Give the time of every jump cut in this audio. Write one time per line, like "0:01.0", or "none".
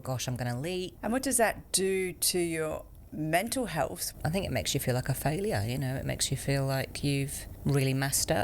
0:00.9
0:01.6
0:04.0
0:07.4

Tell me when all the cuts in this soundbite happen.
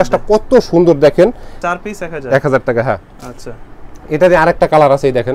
none

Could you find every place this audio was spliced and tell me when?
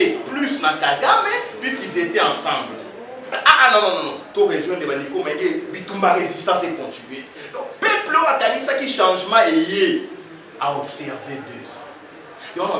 0:03.4

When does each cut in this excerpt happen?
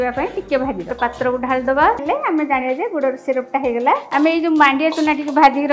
0:00.9
0:02.0

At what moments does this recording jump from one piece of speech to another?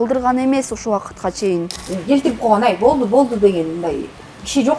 0:01.8

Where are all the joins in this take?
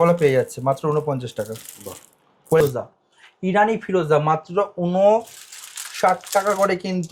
0:02.6

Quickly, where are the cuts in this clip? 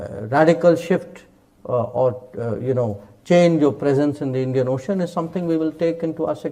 none

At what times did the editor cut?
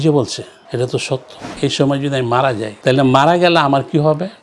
0:01.6

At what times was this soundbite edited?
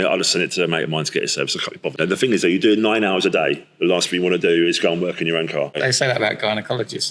0:01.9
0:05.8

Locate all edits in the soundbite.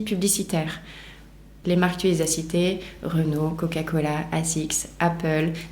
0:01.5

